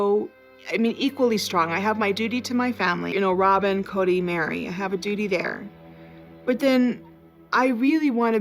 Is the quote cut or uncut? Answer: cut